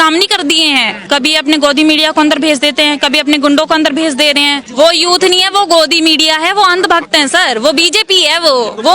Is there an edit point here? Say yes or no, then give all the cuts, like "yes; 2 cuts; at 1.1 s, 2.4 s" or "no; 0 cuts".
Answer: yes; 2 cuts; at 1.0 s, 4.6 s